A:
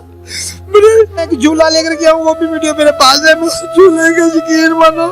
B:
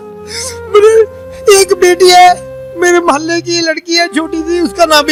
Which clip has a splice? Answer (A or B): A